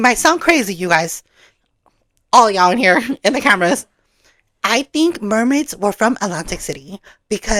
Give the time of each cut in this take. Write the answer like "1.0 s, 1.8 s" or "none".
none